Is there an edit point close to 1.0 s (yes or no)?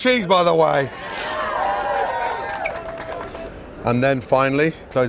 no